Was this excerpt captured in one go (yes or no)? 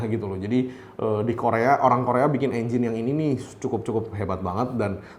yes